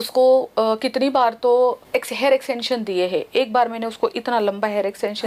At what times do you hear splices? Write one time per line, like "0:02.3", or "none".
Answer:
0:01.8

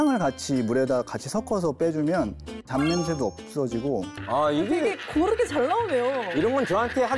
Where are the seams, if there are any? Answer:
0:02.5
0:04.1

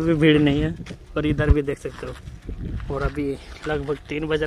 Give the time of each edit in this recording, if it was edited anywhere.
none

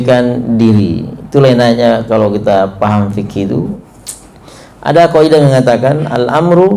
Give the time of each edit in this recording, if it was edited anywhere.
0:03.8

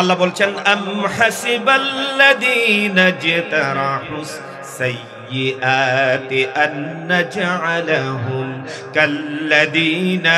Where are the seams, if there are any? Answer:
none

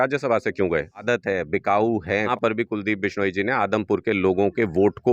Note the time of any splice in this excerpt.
0:01.0
0:02.3

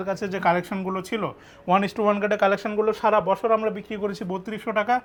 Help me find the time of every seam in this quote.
none

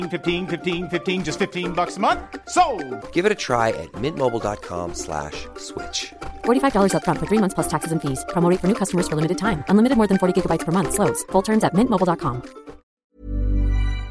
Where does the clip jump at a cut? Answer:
0:12.9

